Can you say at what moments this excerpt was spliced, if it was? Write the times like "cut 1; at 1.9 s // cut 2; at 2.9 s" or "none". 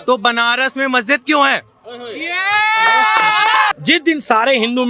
cut 1; at 3.8 s